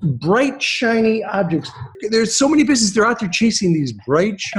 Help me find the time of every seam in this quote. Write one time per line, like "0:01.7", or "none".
0:01.9